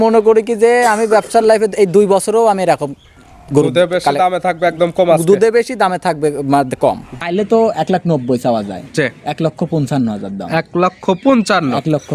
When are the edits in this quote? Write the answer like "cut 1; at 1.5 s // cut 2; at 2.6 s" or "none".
cut 1; at 7.1 s